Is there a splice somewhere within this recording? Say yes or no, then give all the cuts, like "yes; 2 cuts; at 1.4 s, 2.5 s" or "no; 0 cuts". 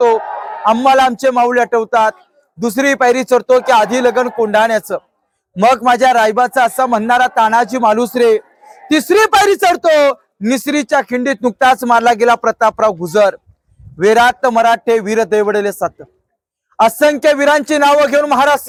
no; 0 cuts